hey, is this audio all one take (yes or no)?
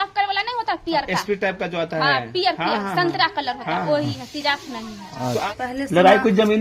no